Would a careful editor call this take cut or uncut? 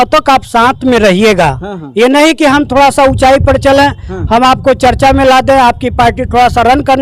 uncut